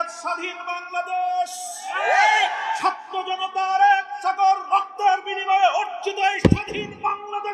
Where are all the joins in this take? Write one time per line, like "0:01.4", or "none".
none